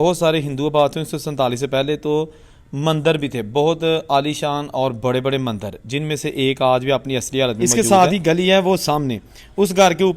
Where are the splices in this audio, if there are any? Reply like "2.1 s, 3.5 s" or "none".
7.6 s